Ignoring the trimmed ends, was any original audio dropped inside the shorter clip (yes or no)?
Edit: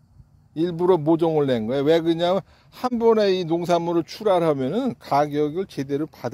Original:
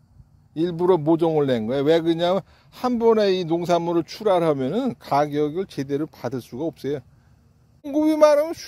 no